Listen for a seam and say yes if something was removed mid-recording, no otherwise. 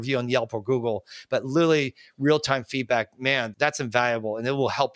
no